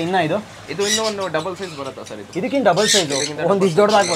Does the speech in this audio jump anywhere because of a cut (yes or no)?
no